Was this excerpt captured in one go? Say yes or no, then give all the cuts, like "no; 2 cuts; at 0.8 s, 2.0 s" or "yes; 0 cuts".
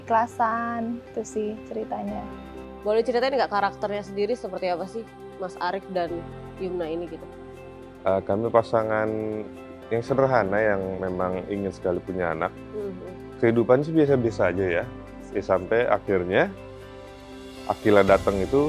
yes; 0 cuts